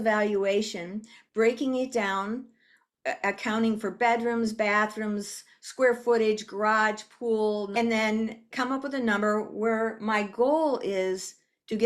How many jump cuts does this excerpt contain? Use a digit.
2